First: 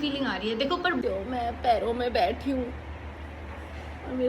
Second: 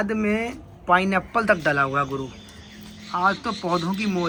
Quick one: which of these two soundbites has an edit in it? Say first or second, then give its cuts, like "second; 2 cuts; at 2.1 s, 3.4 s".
first; 1 cut; at 1.0 s